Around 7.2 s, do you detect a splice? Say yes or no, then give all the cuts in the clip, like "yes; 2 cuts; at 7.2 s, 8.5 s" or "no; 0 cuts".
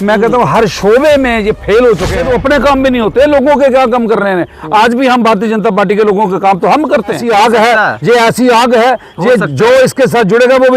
yes; 2 cuts; at 2.2 s, 7.2 s